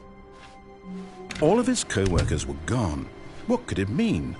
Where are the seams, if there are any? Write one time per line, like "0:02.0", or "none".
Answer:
0:01.4